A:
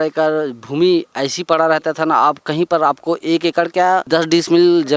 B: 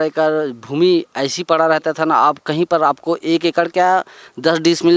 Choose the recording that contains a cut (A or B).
A